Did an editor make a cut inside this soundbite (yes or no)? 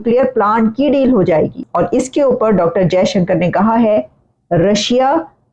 yes